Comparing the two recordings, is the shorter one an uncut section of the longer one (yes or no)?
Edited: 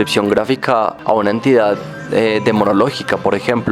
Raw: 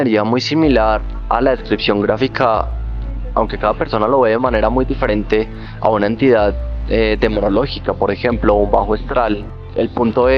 no